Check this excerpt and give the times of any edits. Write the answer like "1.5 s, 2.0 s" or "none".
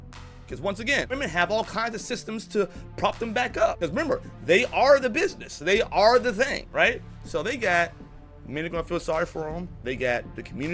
1.1 s, 3.8 s, 6.6 s